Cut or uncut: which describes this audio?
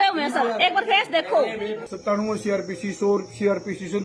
cut